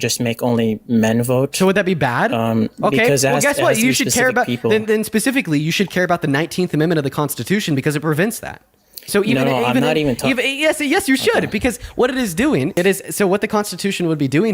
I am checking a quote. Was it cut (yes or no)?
yes